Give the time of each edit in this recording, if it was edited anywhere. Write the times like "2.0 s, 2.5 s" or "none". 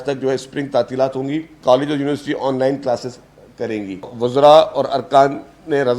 1.5 s, 4.1 s